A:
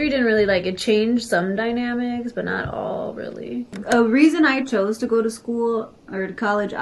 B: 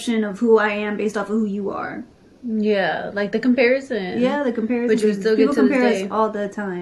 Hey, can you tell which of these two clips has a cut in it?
A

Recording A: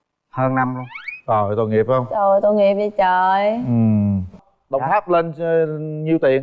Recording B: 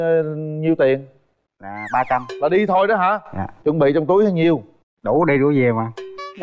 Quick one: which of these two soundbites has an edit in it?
A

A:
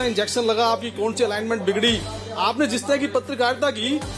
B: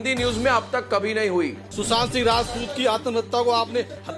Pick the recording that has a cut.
B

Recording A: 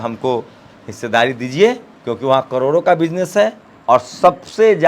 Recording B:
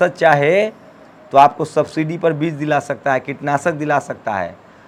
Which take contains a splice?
A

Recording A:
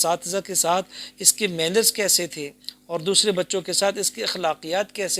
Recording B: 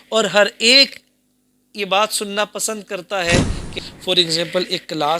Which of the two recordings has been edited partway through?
B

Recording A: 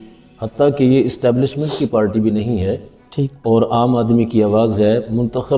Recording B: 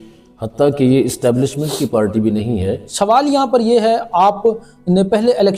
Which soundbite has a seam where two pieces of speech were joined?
B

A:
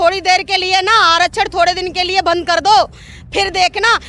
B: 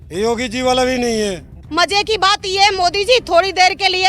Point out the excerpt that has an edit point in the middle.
B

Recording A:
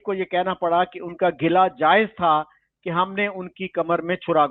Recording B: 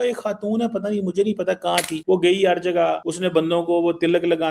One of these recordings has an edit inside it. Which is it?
B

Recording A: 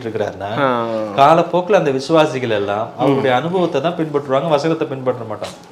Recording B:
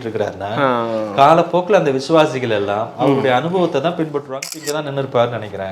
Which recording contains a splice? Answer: B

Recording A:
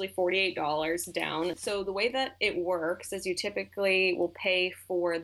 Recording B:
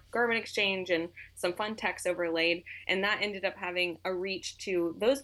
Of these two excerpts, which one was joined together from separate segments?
A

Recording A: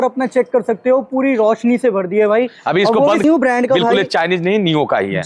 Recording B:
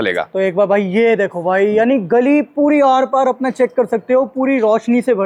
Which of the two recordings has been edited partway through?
A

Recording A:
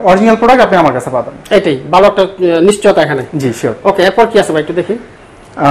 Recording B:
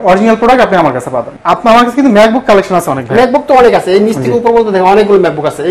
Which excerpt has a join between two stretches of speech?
B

